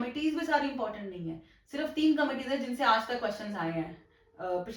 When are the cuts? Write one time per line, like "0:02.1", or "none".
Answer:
none

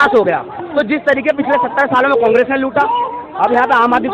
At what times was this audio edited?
none

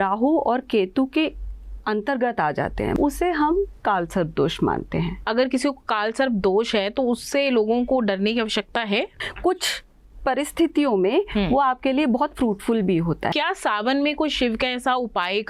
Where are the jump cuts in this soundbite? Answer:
0:02.9
0:05.2
0:09.2
0:13.3

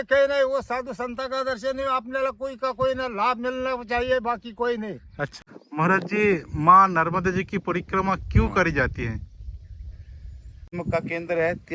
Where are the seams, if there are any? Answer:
0:05.3
0:10.7

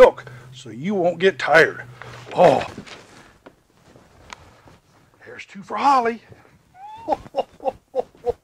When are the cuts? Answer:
0:02.7

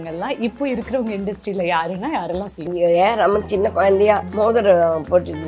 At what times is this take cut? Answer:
0:02.7
0:04.3

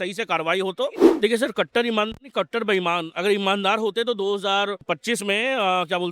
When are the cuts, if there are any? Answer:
0:01.1
0:04.9

